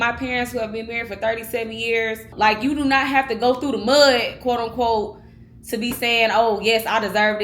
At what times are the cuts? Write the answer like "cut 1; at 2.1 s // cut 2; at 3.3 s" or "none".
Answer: cut 1; at 2.3 s